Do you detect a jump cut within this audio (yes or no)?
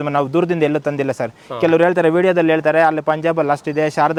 no